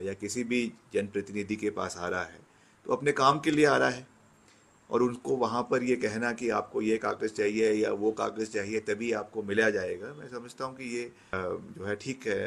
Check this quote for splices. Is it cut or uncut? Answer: cut